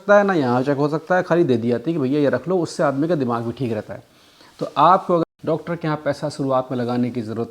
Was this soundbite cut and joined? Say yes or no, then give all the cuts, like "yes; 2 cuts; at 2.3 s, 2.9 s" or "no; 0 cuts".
yes; 1 cut; at 5.4 s